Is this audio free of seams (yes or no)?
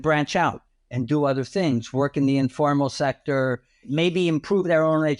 no